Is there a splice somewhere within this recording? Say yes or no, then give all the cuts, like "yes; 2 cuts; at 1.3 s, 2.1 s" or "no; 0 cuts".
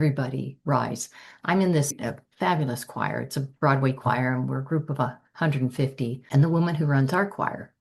yes; 2 cuts; at 2.0 s, 6.2 s